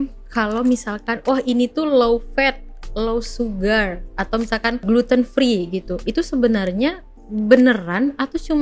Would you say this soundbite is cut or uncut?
cut